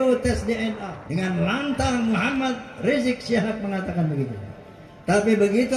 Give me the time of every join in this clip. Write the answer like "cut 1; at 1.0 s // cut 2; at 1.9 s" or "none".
cut 1; at 0.9 s